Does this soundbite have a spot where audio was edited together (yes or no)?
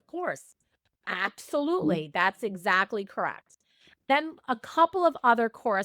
yes